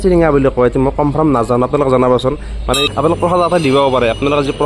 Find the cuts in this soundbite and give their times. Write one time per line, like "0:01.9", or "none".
0:02.8